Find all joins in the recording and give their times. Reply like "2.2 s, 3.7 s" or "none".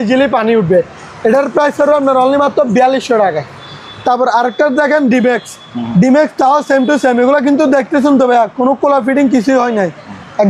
none